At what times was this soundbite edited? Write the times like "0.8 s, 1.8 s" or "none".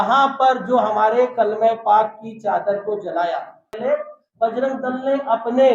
3.8 s